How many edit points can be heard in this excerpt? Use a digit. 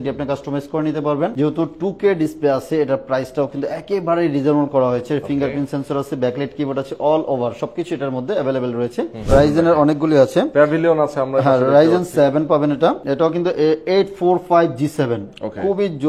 3